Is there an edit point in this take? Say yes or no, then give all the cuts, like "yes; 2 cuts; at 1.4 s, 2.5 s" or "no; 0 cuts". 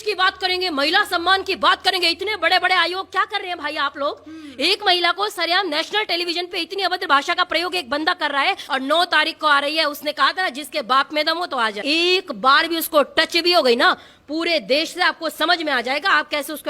yes; 2 cuts; at 8.6 s, 11.8 s